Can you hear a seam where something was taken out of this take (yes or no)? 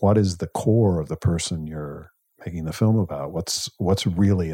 no